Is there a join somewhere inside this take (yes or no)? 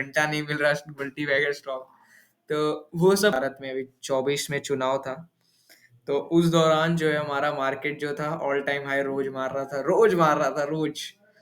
yes